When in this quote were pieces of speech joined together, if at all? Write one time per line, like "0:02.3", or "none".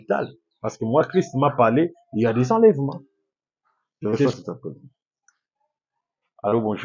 0:04.3